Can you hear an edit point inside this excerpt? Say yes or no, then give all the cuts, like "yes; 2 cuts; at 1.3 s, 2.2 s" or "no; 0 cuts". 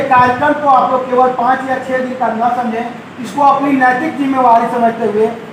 no; 0 cuts